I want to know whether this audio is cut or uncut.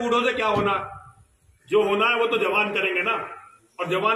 uncut